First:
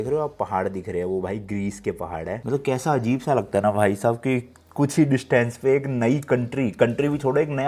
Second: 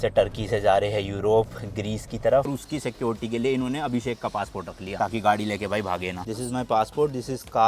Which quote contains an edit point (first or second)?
second